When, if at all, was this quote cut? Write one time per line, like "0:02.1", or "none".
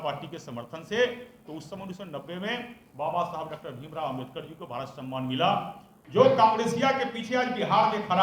0:06.0